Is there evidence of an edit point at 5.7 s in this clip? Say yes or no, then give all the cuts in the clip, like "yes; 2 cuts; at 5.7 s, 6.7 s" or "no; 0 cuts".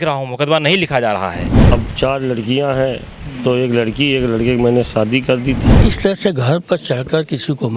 yes; 2 cuts; at 1.5 s, 5.7 s